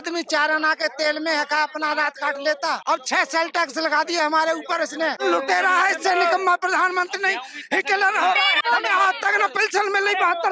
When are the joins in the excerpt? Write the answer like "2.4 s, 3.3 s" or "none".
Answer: 2.8 s, 5.2 s, 8.6 s